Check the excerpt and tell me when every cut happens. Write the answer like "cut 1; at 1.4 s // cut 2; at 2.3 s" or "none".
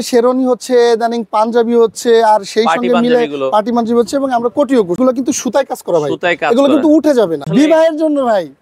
cut 1; at 5.0 s // cut 2; at 7.5 s